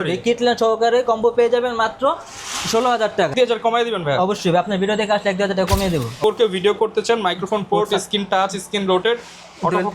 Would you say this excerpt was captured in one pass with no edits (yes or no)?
no